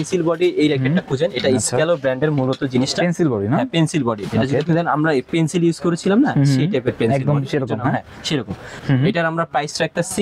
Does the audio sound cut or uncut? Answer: cut